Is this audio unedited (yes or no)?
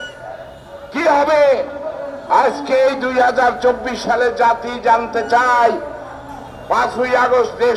yes